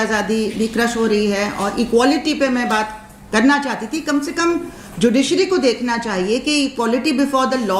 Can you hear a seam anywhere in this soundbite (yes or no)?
no